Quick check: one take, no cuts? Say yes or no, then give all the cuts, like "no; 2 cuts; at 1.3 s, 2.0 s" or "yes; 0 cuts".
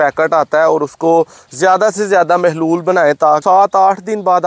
no; 1 cut; at 3.4 s